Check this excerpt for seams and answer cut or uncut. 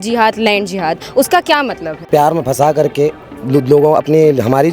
cut